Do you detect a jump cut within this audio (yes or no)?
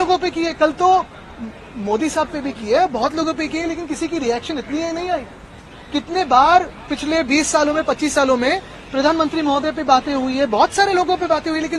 no